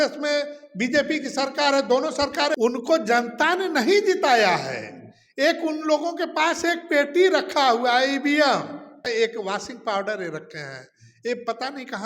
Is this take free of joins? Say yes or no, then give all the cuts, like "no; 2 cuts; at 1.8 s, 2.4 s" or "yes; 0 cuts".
no; 2 cuts; at 2.5 s, 9.0 s